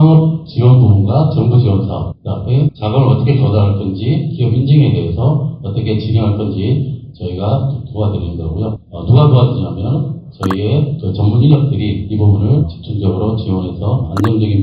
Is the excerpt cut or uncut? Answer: uncut